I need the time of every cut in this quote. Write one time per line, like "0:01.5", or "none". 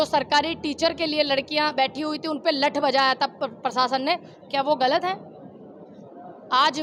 none

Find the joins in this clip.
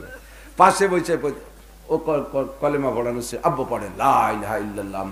none

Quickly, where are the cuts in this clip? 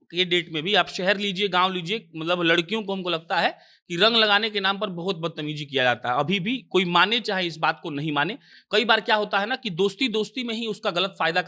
none

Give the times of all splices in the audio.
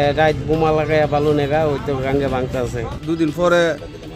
0:02.9

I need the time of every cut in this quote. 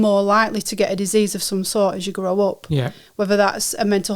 none

